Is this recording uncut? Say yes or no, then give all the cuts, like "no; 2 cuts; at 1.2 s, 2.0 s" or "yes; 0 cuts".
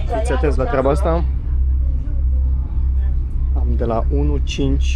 yes; 0 cuts